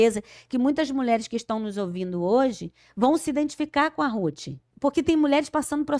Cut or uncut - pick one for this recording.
cut